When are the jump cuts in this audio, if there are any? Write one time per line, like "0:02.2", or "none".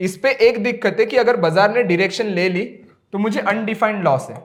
none